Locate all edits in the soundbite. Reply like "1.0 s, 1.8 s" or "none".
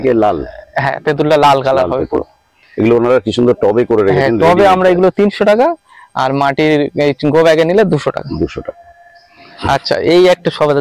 none